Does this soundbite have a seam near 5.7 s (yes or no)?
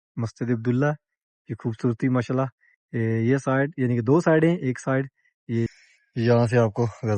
yes